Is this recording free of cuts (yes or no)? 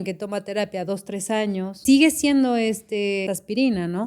no